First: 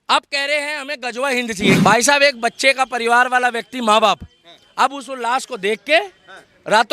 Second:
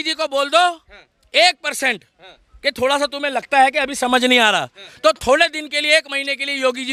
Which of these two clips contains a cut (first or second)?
first